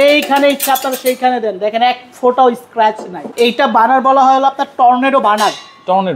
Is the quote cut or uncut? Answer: cut